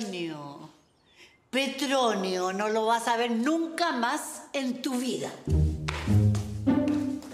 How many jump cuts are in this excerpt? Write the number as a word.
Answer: zero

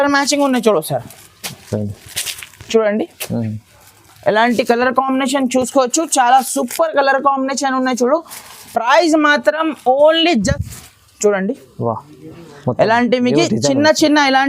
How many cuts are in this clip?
one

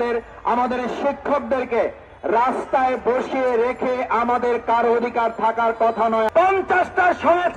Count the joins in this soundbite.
one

